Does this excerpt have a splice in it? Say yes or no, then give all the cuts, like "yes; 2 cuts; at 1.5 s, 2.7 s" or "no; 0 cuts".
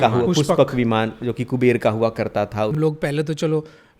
yes; 1 cut; at 2.7 s